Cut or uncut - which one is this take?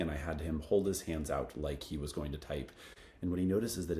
cut